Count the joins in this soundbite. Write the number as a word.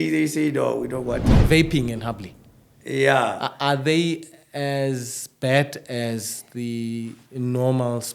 one